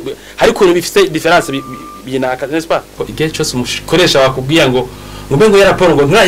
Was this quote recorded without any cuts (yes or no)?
no